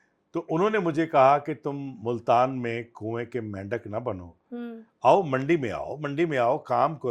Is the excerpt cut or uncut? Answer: uncut